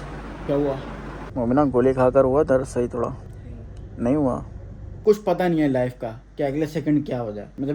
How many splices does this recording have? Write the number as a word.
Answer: two